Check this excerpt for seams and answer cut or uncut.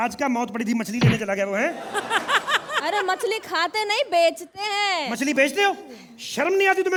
uncut